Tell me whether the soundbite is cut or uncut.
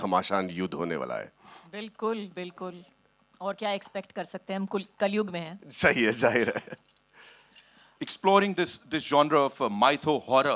cut